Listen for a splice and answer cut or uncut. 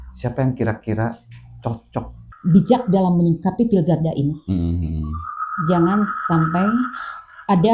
cut